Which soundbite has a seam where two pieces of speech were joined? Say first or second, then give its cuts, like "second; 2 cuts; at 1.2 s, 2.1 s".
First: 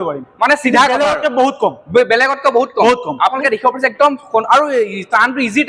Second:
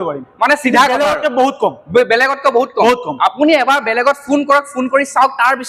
first; 1 cut; at 3.4 s